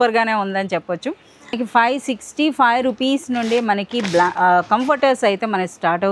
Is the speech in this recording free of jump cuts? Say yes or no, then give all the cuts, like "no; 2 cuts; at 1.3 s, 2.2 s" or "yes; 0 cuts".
no; 1 cut; at 1.5 s